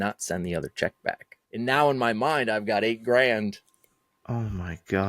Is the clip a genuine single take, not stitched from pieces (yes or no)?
no